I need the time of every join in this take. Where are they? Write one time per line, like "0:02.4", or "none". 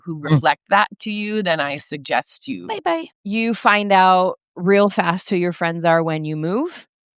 0:03.1